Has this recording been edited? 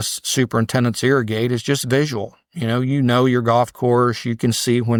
no; 0 cuts

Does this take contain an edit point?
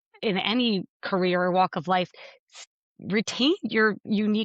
yes; 1 cut; at 2.1 s

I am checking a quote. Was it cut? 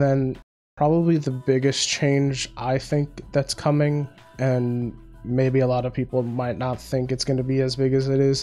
no; 0 cuts

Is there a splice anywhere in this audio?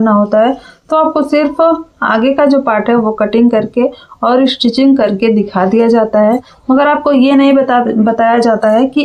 no; 0 cuts

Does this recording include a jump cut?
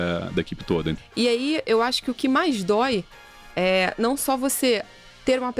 yes; 1 cut; at 1.0 s

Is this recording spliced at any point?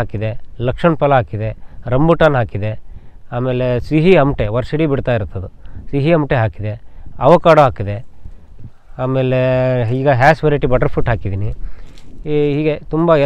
no; 0 cuts

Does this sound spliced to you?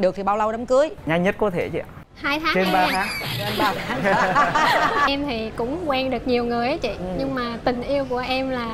yes; 1 cut; at 5.1 s

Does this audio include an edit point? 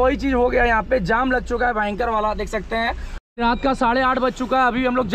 yes; 1 cut; at 3.1 s

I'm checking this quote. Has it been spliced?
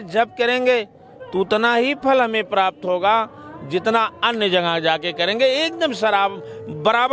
no; 0 cuts

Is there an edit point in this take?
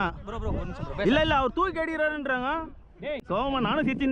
yes; 1 cut; at 3.2 s

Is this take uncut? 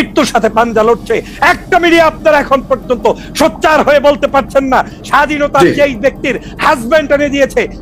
no; 1 cut; at 5.0 s

